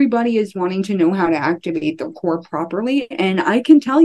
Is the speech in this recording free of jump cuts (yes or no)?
yes